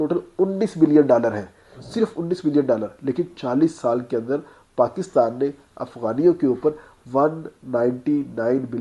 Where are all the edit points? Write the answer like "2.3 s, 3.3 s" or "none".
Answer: none